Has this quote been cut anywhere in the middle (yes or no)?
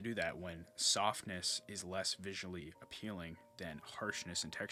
no